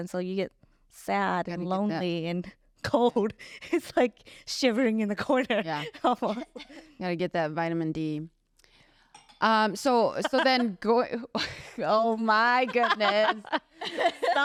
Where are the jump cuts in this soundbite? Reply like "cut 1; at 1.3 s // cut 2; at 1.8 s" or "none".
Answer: none